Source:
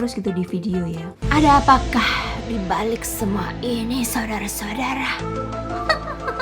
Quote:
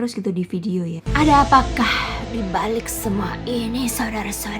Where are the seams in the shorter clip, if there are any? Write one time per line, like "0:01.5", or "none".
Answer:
0:01.0